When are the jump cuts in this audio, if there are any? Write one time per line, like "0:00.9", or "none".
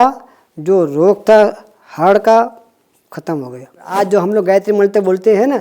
0:03.9